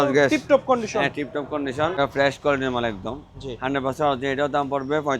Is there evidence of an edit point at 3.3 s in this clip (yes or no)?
no